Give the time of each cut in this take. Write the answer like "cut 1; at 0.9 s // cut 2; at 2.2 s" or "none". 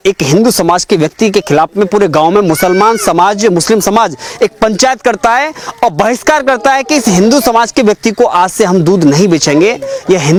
none